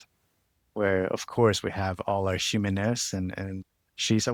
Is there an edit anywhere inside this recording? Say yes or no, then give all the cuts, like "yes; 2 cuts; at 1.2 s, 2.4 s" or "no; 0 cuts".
no; 0 cuts